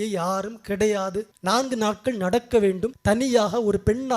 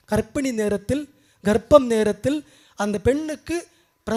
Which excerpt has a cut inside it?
first; 2 cuts; at 1.3 s, 2.9 s

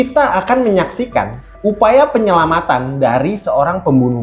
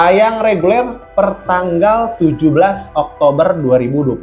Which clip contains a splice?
first; 1 cut; at 1.4 s

